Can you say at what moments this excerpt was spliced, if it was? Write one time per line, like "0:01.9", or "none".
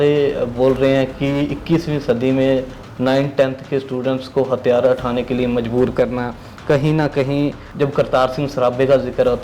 0:07.6